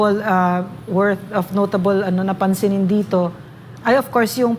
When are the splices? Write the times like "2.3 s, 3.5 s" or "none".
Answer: none